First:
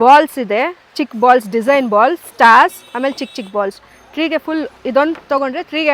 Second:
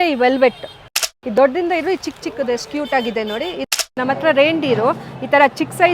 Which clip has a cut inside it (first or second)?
second